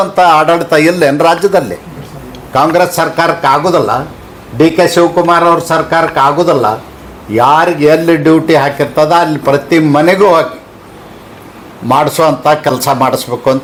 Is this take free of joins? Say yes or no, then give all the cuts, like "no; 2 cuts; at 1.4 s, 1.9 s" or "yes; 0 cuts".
yes; 0 cuts